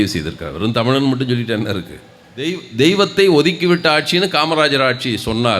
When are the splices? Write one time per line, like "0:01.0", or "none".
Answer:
0:02.6